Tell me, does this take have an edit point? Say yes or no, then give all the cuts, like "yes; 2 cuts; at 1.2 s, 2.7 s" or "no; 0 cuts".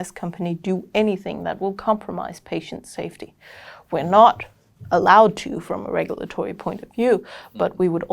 no; 0 cuts